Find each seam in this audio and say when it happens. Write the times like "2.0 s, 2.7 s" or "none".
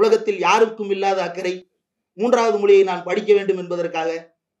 none